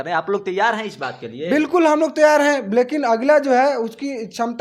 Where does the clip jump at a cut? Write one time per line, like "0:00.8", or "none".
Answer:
none